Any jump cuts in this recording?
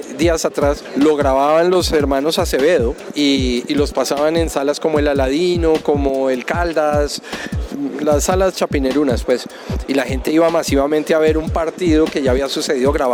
no; 0 cuts

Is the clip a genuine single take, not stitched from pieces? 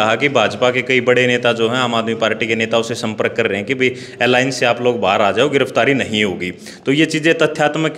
yes; 0 cuts

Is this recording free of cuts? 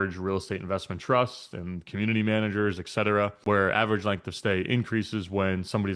no; 1 cut; at 3.4 s

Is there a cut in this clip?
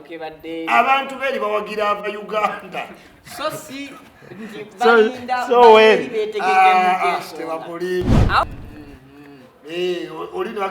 yes; 1 cut; at 8.4 s

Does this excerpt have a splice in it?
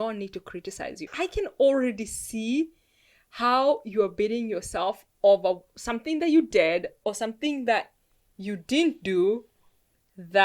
yes; 1 cut; at 1.1 s

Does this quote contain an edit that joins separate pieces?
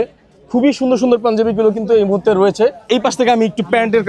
no; 0 cuts

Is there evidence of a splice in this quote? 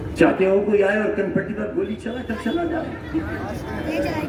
no; 0 cuts

